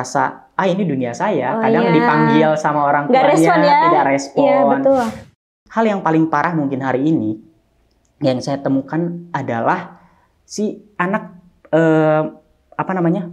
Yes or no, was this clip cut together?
yes